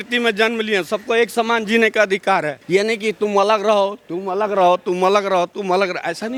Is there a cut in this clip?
no; 0 cuts

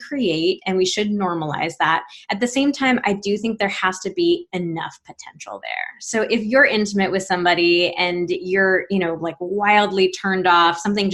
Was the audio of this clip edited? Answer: no; 0 cuts

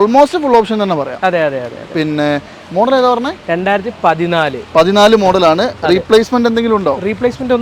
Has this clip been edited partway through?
no; 0 cuts

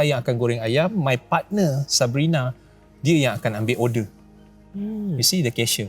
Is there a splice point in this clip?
no; 0 cuts

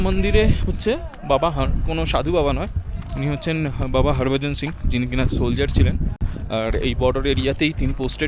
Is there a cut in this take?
no; 0 cuts

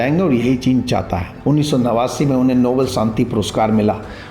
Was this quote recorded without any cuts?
no; 1 cut; at 1.3 s

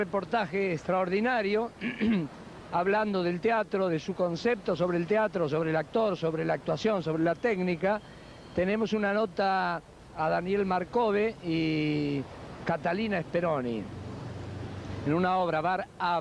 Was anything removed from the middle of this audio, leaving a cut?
no; 0 cuts

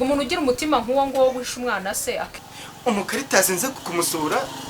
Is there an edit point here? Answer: yes; 2 cuts; at 2.4 s, 3.8 s

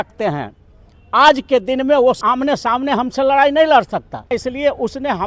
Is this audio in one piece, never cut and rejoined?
no; 2 cuts; at 2.2 s, 4.4 s

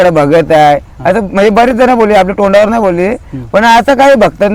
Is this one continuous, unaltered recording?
yes; 0 cuts

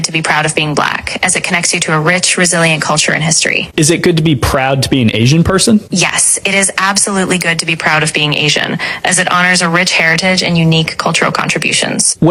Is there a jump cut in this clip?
no; 0 cuts

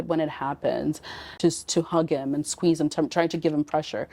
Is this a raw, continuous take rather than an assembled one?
no; 1 cut; at 1.4 s

